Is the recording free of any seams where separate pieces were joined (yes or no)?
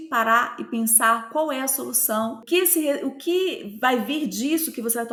yes